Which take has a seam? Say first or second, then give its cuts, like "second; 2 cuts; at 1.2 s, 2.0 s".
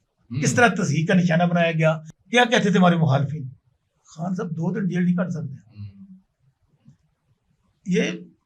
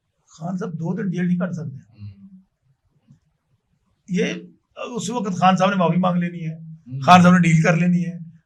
first; 1 cut; at 2.1 s